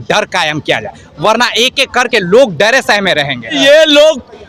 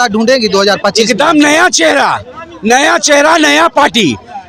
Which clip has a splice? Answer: first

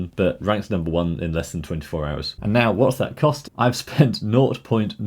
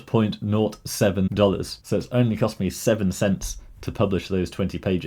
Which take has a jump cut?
first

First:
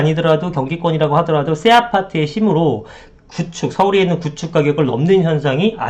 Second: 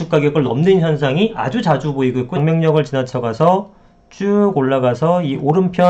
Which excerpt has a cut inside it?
second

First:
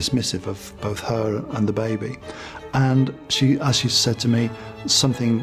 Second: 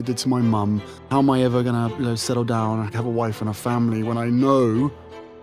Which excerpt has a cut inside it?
second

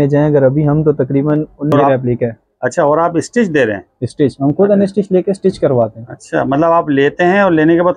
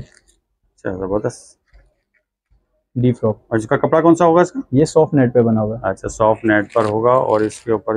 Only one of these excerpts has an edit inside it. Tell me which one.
first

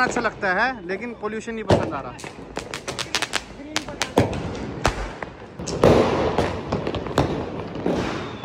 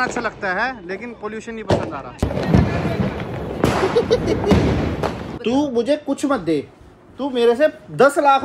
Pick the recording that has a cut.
second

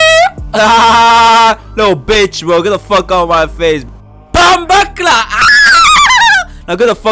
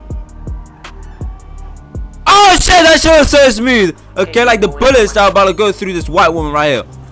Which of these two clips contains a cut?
first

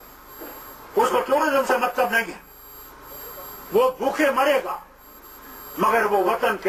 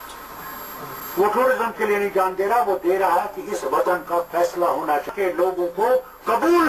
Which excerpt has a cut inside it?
second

